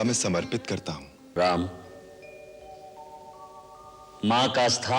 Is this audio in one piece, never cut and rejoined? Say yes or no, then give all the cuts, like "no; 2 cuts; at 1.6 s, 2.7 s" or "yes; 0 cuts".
no; 1 cut; at 1.1 s